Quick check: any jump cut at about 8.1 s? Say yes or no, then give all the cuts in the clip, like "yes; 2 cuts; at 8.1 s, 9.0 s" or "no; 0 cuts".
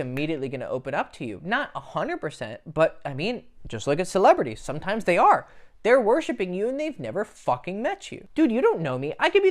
yes; 1 cut; at 8.1 s